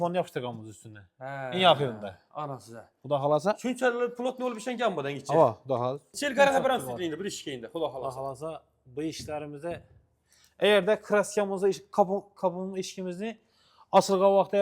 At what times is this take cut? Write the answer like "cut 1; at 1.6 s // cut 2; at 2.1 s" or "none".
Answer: cut 1; at 6.2 s